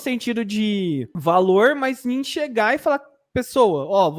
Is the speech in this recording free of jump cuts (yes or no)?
no